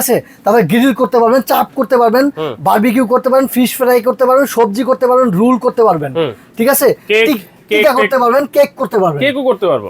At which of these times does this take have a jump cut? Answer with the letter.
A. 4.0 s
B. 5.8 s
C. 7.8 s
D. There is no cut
D